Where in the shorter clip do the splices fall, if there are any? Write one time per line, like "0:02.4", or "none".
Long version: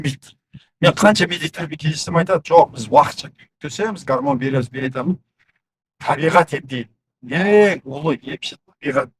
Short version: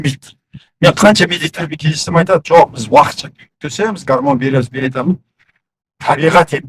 none